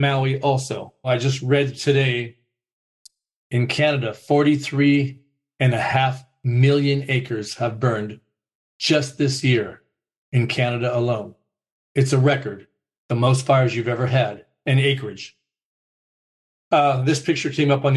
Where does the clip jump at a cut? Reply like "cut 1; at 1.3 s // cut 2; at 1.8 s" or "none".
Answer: cut 1; at 1.1 s